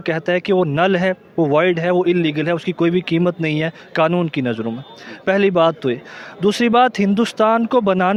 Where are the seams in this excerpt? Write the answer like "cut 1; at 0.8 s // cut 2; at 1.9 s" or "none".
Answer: none